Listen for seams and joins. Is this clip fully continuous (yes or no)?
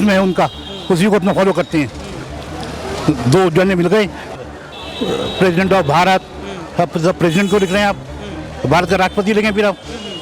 no